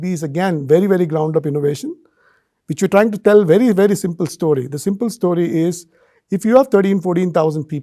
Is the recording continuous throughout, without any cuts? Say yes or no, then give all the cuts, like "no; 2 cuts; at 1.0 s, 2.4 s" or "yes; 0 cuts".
yes; 0 cuts